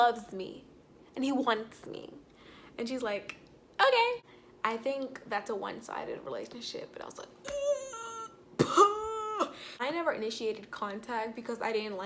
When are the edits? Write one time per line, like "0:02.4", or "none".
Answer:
0:04.3
0:09.8